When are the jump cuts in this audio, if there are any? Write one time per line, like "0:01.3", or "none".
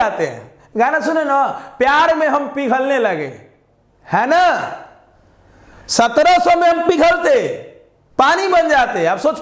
none